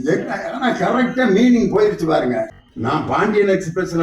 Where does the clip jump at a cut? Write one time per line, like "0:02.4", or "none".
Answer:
0:02.6